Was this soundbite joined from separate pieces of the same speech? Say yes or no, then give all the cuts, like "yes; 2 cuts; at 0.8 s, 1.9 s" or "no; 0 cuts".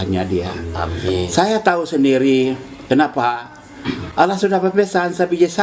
no; 0 cuts